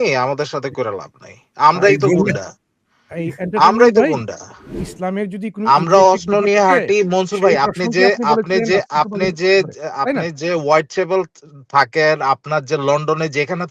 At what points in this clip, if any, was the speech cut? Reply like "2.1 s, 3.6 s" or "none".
4.8 s

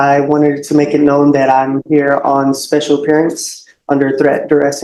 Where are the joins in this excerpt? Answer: none

